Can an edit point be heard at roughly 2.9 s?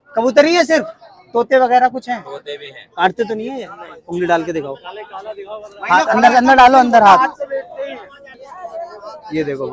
yes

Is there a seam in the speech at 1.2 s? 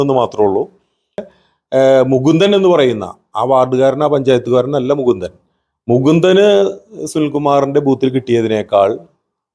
yes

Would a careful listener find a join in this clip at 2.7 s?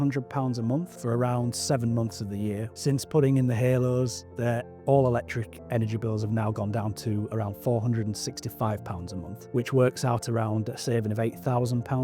yes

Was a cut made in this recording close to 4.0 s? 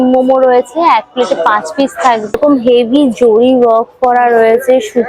no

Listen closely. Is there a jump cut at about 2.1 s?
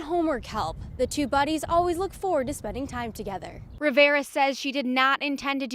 no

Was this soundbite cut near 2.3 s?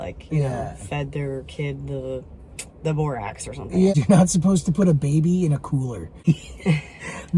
no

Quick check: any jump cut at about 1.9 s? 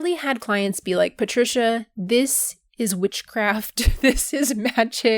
yes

